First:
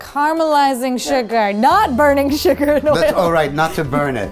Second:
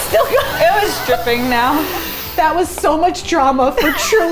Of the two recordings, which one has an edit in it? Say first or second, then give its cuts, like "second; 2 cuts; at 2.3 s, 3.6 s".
second; 1 cut; at 2.2 s